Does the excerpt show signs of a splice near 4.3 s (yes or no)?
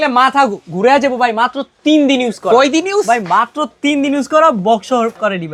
no